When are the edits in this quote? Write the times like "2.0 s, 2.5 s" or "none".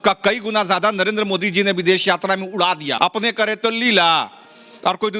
3.0 s